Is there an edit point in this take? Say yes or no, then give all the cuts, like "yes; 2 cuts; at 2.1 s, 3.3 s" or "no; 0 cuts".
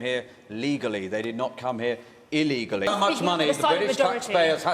yes; 1 cut; at 2.9 s